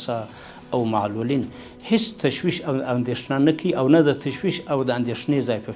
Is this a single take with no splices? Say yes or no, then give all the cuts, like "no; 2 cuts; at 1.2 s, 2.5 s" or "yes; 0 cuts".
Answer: yes; 0 cuts